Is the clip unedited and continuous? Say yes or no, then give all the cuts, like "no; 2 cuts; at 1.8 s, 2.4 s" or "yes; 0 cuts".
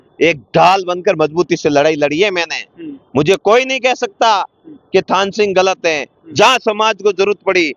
yes; 0 cuts